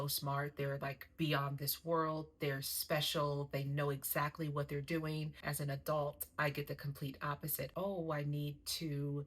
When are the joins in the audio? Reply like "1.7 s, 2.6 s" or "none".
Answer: 5.4 s, 7.7 s